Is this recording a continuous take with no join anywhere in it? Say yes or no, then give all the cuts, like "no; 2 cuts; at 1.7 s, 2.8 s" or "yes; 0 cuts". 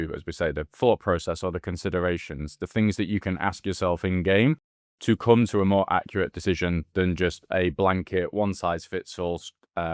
yes; 0 cuts